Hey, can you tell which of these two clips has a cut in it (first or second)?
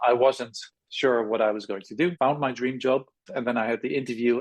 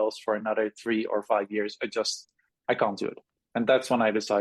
first